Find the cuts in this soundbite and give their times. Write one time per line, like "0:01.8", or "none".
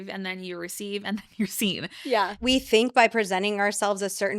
0:02.4